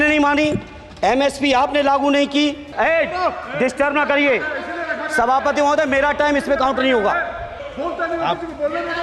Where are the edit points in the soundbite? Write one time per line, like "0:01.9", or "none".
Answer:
0:02.7
0:07.6